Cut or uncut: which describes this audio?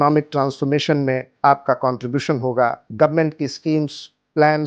cut